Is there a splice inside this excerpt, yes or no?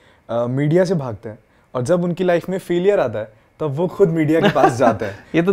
no